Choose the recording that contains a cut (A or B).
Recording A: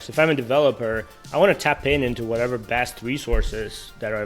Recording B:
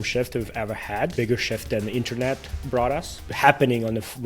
B